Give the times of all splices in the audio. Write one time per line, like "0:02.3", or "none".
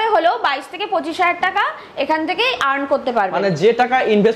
none

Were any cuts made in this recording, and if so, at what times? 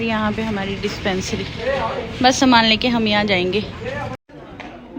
none

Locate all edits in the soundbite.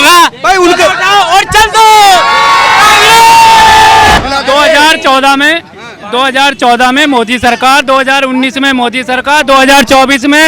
0:04.2

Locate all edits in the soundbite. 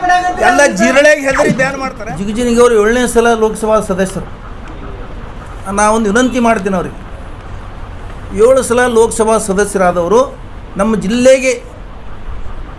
0:01.7
0:05.5

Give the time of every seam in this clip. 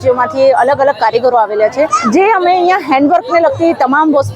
0:02.0

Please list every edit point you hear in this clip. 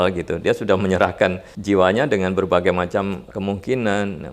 0:01.5
0:03.3

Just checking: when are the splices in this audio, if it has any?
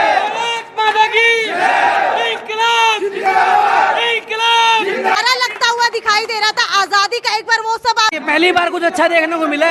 0:05.2
0:08.1

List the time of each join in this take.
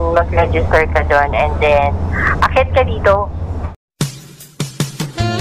0:03.7

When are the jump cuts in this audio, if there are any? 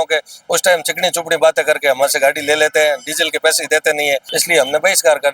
0:04.3

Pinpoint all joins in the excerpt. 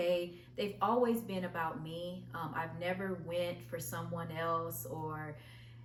none

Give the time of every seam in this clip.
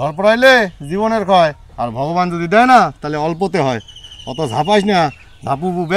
none

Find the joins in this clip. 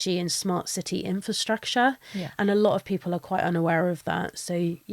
none

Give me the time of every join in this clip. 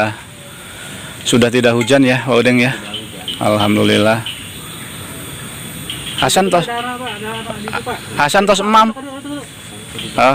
none

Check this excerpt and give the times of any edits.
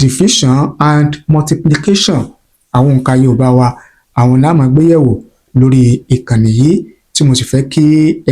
none

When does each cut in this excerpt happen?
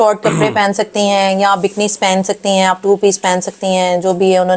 none

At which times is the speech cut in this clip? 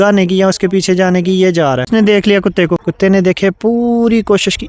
0:01.9
0:02.8

